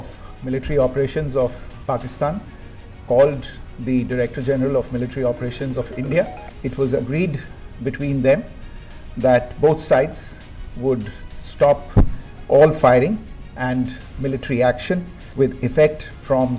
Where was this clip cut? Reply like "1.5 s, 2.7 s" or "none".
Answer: 6.5 s, 15.2 s